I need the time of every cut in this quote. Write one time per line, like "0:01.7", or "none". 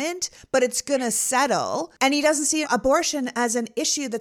0:01.9